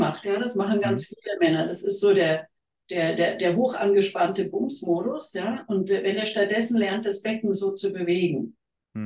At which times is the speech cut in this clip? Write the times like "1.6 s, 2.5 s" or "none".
none

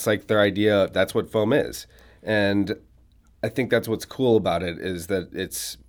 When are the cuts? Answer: none

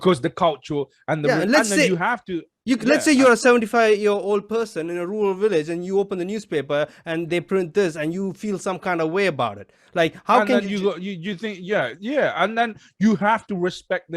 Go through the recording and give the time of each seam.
none

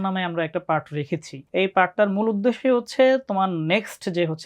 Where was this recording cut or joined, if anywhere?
1.4 s

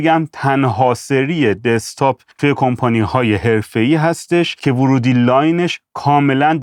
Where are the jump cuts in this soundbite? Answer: none

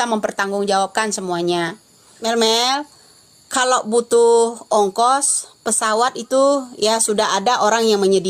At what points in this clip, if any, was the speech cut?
2.1 s

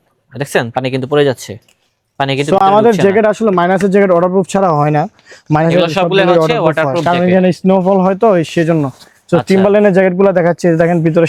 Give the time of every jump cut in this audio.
none

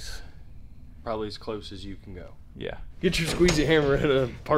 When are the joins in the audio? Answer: 2.8 s

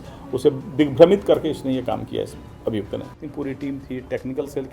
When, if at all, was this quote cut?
3.2 s

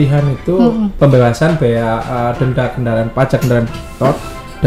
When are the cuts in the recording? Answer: 1.0 s

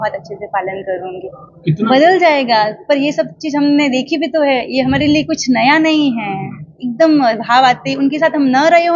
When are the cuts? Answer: 1.9 s

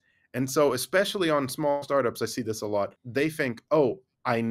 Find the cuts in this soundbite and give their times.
3.0 s

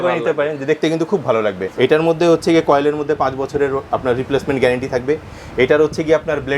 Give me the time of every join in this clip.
1.7 s

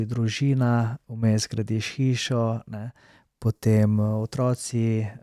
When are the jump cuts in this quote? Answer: none

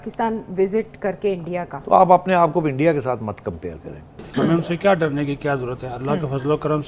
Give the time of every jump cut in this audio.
1.7 s, 4.2 s

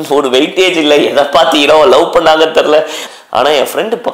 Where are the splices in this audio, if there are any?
3.0 s

